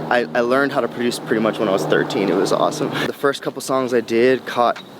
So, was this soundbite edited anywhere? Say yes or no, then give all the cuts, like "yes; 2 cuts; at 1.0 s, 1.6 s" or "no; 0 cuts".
yes; 1 cut; at 3.0 s